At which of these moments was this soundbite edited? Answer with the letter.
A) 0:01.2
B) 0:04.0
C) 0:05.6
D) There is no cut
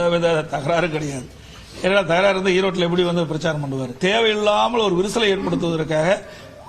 B